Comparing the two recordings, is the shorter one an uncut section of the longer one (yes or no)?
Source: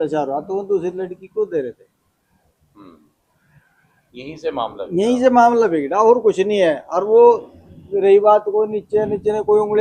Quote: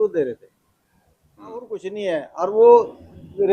no